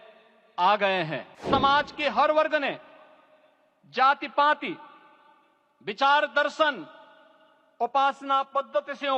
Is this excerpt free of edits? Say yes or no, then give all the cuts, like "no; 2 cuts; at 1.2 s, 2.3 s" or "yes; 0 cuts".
no; 1 cut; at 1.4 s